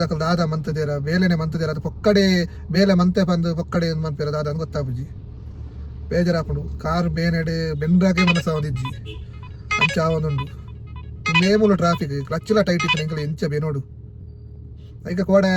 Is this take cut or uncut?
uncut